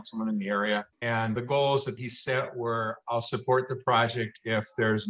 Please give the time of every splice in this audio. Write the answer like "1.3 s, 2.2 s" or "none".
0.9 s